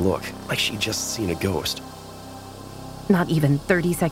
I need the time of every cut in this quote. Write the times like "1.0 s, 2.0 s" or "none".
2.4 s